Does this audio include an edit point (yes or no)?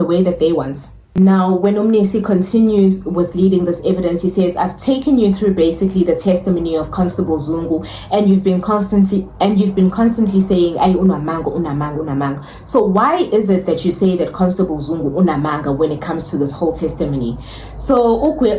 no